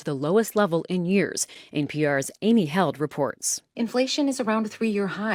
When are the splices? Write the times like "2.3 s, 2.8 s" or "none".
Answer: none